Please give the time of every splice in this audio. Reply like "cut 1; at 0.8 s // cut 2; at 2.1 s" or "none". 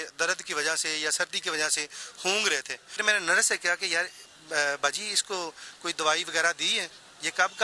cut 1; at 3.0 s